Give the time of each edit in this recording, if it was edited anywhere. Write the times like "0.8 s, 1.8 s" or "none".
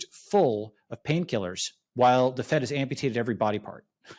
1.8 s